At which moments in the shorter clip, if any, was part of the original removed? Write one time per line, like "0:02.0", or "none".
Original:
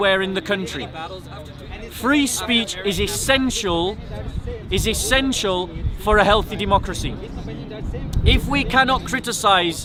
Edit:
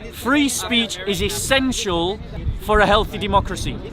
0:02.4